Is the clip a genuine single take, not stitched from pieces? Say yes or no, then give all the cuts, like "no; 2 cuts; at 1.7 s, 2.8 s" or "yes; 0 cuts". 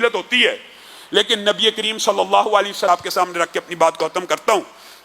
no; 1 cut; at 2.9 s